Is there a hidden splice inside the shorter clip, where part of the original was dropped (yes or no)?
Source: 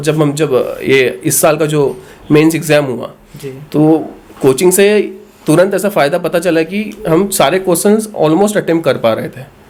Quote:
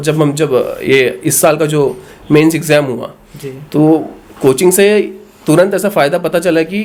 no